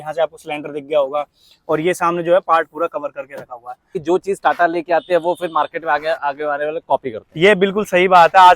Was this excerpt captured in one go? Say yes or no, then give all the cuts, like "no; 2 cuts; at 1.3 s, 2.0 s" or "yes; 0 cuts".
no; 1 cut; at 4.0 s